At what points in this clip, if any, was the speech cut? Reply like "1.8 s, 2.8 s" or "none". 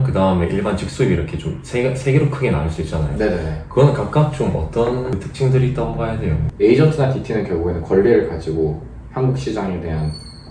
5.2 s, 6.4 s